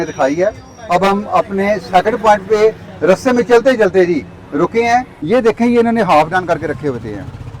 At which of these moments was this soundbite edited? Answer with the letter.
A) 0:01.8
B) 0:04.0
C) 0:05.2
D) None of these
C